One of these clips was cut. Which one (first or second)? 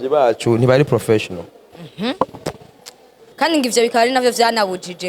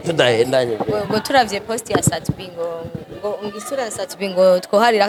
first